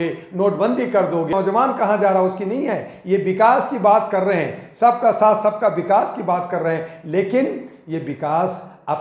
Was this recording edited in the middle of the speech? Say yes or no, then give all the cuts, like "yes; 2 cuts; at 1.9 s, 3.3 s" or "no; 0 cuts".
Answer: yes; 1 cut; at 1.3 s